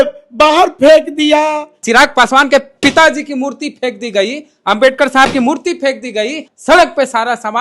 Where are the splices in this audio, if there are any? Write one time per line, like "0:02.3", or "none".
0:01.7
0:06.5